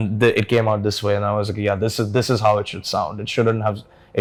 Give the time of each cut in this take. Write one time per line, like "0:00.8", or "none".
none

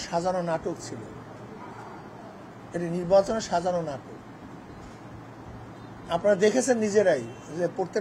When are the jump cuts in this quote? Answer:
none

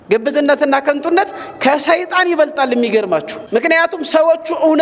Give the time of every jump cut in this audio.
0:03.4

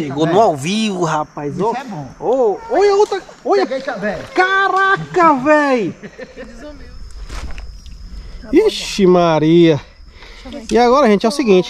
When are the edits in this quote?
0:06.5

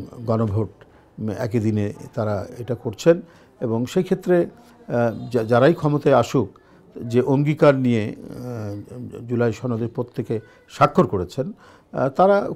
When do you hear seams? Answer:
none

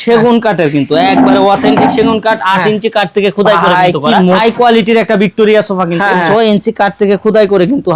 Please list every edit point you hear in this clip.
0:04.4
0:06.3

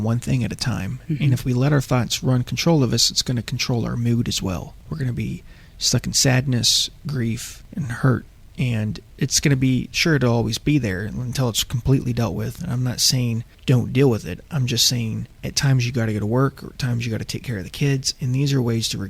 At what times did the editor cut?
0:04.8
0:07.6
0:13.5
0:15.3

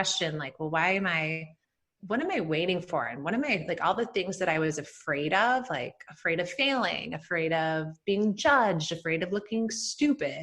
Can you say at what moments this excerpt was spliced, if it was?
none

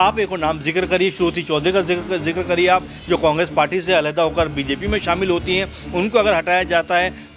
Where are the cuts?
none

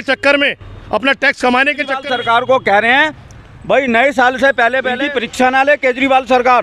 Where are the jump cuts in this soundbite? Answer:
0:02.0
0:04.9

